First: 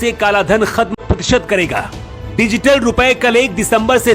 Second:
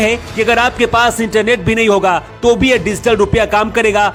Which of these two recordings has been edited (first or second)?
first